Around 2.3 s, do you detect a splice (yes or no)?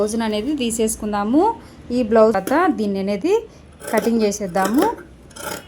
yes